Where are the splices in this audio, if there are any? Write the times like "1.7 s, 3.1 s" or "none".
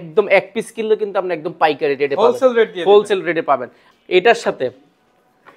3.8 s